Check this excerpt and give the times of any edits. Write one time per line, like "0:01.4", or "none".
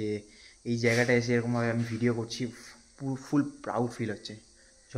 none